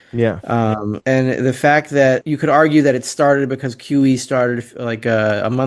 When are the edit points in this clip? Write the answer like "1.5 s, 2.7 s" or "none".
1.0 s, 2.3 s